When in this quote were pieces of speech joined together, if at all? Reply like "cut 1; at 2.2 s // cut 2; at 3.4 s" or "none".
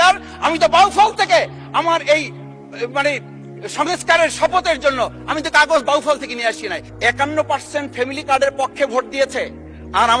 cut 1; at 6.8 s